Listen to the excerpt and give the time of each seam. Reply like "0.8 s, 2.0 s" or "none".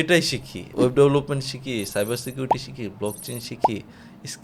none